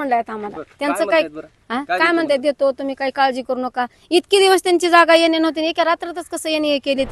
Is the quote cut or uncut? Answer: uncut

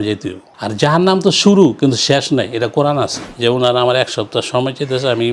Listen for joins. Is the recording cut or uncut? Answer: cut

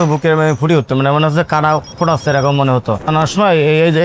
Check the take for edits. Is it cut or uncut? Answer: cut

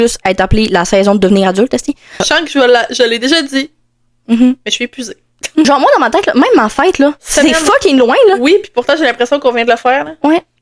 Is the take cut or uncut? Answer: cut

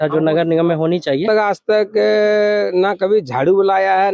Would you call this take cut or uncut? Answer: cut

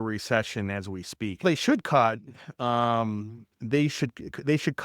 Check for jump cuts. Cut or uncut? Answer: cut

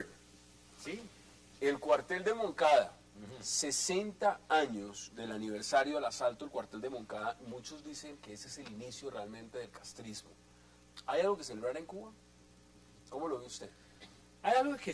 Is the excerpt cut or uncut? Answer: cut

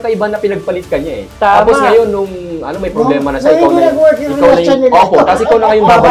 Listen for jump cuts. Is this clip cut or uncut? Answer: uncut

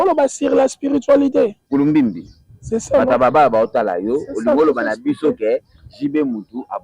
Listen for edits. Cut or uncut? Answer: cut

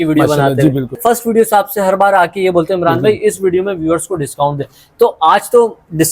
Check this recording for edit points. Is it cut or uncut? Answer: cut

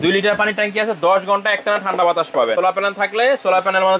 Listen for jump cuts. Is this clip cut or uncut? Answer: cut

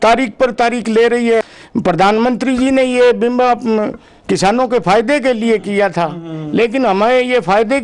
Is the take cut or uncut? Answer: cut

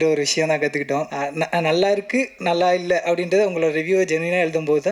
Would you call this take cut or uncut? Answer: cut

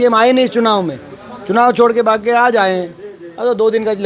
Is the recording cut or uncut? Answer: uncut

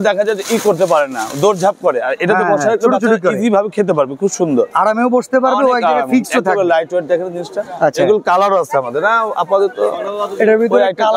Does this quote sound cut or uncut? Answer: uncut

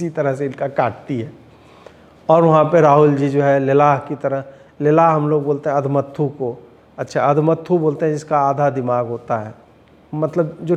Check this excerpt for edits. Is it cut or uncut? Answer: uncut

